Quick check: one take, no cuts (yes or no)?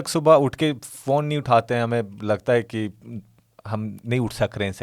yes